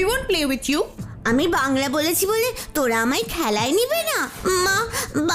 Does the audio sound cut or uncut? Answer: cut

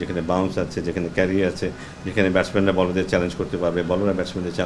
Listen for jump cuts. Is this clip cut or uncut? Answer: uncut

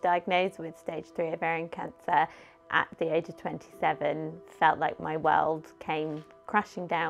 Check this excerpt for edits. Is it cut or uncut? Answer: uncut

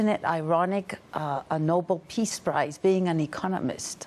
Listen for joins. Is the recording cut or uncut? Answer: uncut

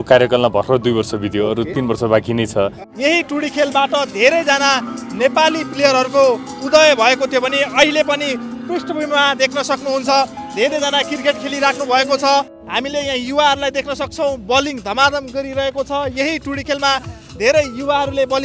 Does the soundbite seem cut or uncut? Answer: cut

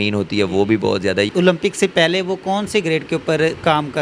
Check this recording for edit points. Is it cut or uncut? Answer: cut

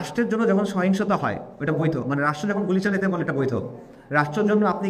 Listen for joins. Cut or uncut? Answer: uncut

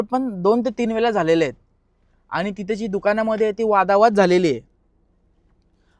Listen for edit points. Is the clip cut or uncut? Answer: uncut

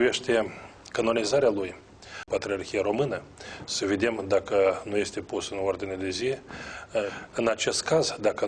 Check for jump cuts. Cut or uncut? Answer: cut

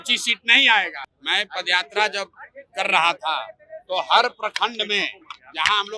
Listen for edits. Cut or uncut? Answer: cut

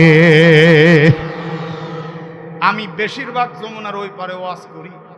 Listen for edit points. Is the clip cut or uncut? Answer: cut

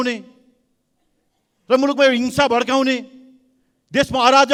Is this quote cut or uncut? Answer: uncut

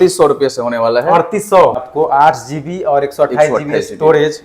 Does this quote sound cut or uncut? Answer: cut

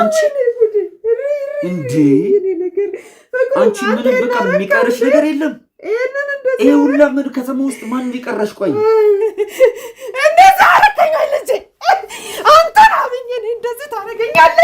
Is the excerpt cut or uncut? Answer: cut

